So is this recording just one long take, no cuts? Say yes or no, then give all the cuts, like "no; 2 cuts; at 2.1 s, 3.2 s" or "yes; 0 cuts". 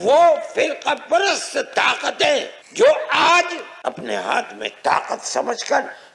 no; 2 cuts; at 2.6 s, 3.7 s